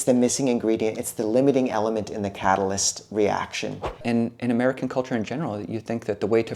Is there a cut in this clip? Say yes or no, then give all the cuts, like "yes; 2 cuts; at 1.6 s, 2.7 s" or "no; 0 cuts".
yes; 1 cut; at 4.0 s